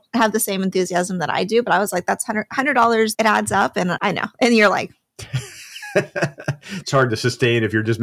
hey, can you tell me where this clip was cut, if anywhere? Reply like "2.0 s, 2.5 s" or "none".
3.1 s, 4.0 s